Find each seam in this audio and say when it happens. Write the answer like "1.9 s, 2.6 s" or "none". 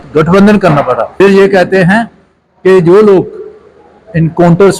1.1 s